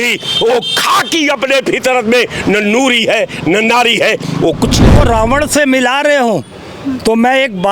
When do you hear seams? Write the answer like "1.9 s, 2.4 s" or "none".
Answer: 4.9 s